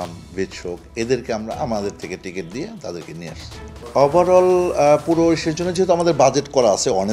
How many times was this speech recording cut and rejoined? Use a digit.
1